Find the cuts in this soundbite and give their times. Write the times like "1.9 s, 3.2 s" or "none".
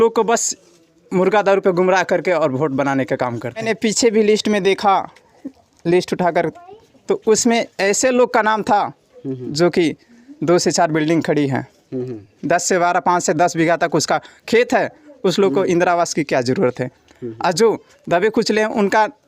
3.6 s

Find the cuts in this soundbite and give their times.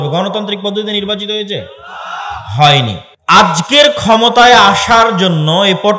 3.0 s

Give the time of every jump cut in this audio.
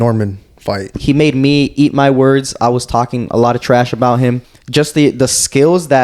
1.0 s, 4.5 s

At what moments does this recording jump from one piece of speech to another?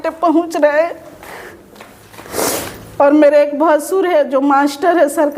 none

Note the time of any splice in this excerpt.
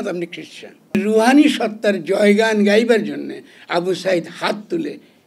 0.9 s

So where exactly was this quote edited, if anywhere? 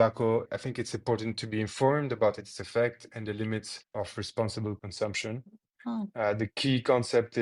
none

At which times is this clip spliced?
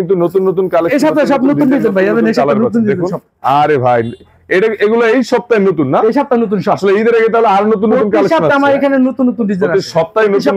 none

